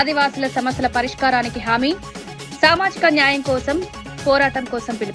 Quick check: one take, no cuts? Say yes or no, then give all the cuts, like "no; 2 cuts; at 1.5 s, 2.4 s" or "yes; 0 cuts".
yes; 0 cuts